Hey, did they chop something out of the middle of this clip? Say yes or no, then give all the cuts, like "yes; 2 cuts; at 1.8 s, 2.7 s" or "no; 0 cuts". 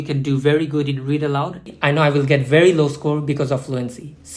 yes; 1 cut; at 1.7 s